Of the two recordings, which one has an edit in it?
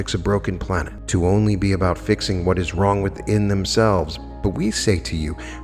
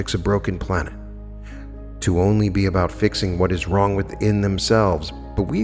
first; 1 cut; at 0.9 s

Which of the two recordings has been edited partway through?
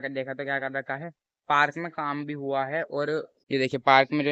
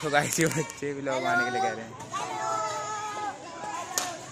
first; 1 cut; at 3.4 s

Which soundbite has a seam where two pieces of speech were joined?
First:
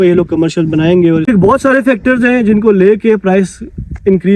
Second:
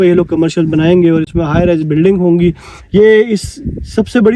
first; 1 cut; at 1.3 s

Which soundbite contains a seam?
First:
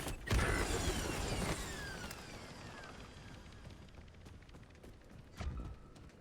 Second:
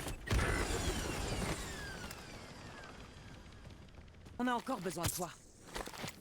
second; 1 cut; at 4.4 s

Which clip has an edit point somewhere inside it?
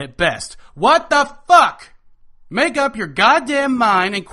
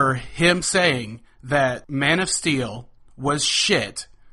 second; 1 cut; at 1.8 s

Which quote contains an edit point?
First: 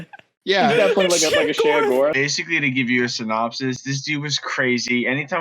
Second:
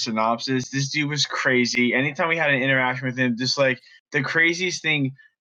first; 1 cut; at 2.2 s

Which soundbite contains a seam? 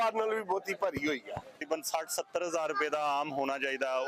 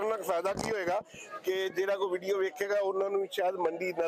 first; 1 cut; at 1.6 s

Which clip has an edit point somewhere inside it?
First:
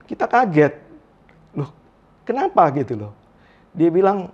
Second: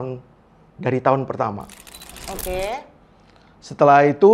second; 1 cut; at 2.2 s

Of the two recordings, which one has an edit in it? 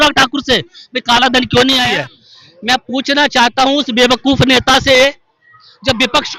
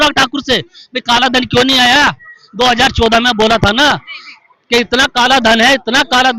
first; 1 cut; at 1.9 s

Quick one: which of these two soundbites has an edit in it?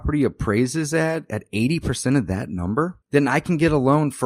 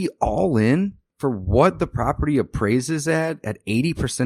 second; 1 cut; at 1.0 s

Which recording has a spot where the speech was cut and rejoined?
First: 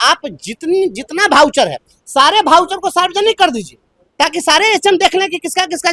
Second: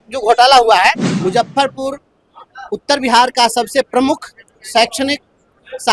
second; 1 cut; at 1.1 s

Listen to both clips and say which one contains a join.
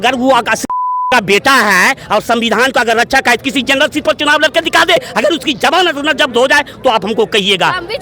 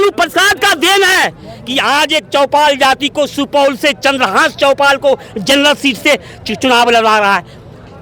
first; 1 cut; at 5.1 s

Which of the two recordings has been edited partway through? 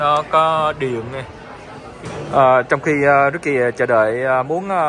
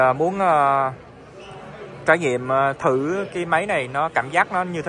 first; 1 cut; at 2.0 s

